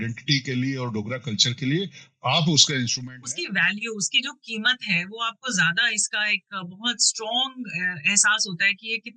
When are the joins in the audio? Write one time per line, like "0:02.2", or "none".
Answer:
0:03.0